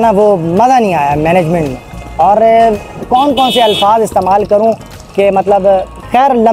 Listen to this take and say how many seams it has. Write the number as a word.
zero